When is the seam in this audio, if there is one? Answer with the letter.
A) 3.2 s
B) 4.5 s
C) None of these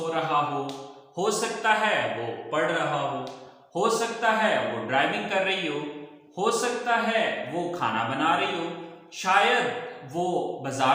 C